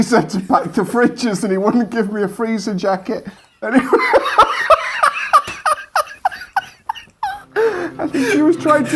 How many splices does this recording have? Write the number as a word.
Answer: zero